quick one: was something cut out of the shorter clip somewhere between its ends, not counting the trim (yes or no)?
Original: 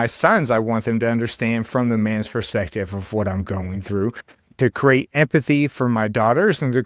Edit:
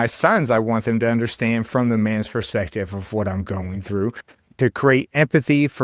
no